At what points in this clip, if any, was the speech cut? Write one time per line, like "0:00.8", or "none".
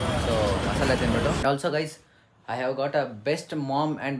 0:01.4